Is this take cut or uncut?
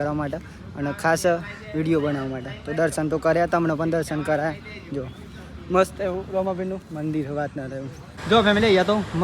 cut